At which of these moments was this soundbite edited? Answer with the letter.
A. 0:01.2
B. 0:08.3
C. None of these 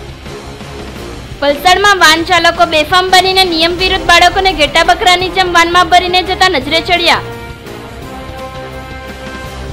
A